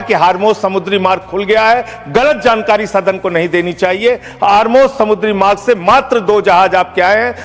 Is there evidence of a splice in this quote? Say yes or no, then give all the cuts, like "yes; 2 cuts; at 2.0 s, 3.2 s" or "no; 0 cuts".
no; 0 cuts